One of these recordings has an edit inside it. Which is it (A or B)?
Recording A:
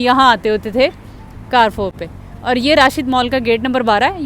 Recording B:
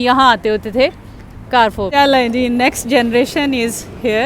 B